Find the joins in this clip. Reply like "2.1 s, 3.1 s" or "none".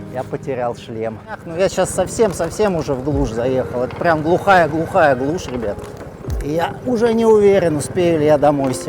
1.5 s, 6.5 s